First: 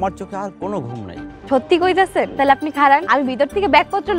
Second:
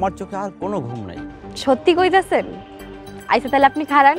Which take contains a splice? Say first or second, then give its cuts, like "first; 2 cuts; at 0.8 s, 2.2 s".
first; 3 cuts; at 1.3 s, 2.3 s, 3.0 s